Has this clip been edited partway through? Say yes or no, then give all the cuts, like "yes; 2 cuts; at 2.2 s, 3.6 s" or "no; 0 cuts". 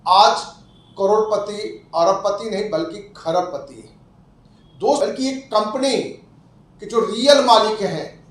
yes; 1 cut; at 5.0 s